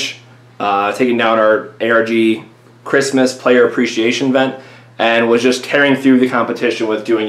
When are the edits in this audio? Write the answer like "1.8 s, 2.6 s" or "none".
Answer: 3.9 s